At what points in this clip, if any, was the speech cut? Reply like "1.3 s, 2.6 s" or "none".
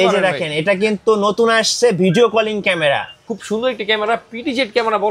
3.3 s

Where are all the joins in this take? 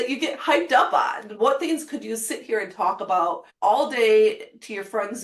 3.5 s

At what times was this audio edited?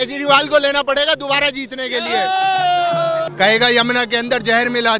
3.3 s

